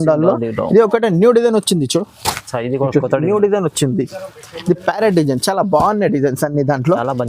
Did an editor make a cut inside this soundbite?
no; 0 cuts

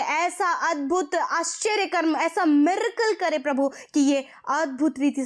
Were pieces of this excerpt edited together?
no; 0 cuts

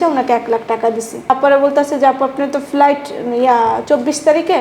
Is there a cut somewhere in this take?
yes; 1 cut; at 1.3 s

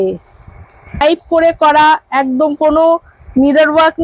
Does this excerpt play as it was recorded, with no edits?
no; 1 cut; at 1.0 s

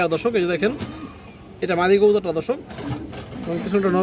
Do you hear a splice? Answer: no; 0 cuts

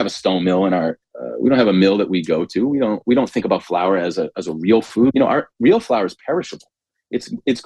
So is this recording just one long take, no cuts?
no; 2 cuts; at 1.0 s, 5.1 s

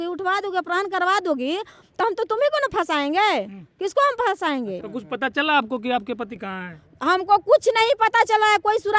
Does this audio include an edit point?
yes; 2 cuts; at 4.8 s, 6.4 s

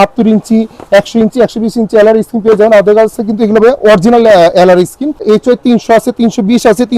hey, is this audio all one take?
no; 1 cut; at 5.2 s

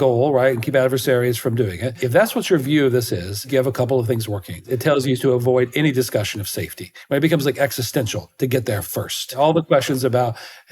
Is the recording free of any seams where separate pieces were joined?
no; 4 cuts; at 2.0 s, 3.5 s, 4.7 s, 9.4 s

